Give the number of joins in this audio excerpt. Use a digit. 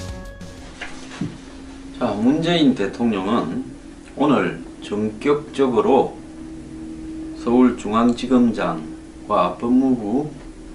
0